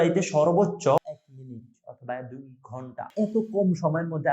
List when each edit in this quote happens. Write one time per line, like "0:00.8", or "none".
0:03.1